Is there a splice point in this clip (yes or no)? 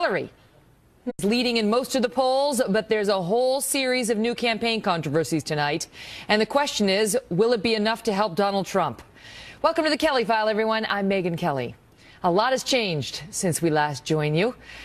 no